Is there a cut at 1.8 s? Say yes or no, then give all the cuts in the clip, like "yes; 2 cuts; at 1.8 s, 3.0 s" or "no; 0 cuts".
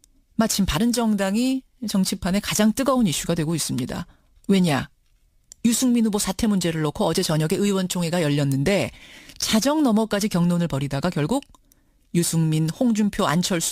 no; 0 cuts